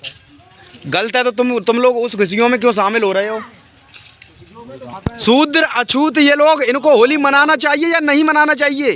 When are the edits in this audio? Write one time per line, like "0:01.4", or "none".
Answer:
0:04.9